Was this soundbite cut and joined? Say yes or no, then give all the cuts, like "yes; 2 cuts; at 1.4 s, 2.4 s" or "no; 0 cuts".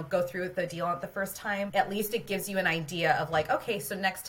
yes; 1 cut; at 1.7 s